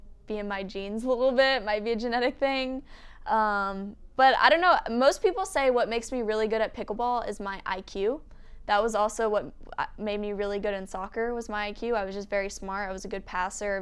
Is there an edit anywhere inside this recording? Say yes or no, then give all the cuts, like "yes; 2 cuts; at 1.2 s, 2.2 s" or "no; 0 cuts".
no; 0 cuts